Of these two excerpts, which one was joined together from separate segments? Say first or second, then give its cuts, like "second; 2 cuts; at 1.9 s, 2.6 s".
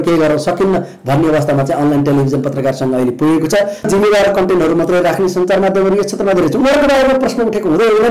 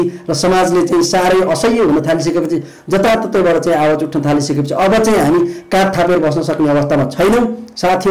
first; 1 cut; at 3.9 s